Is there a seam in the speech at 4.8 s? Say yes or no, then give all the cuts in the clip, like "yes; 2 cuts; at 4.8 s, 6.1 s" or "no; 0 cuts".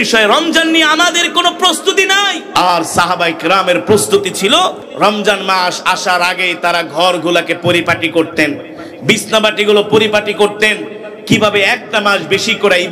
yes; 2 cuts; at 2.5 s, 4.8 s